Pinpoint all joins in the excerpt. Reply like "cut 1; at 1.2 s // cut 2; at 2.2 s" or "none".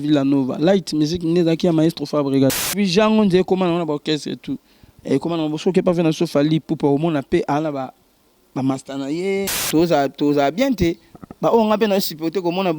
cut 1; at 2.7 s // cut 2; at 9.6 s